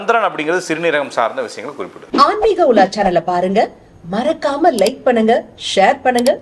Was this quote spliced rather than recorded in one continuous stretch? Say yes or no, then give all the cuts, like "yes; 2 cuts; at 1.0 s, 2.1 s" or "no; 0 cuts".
yes; 1 cut; at 1.9 s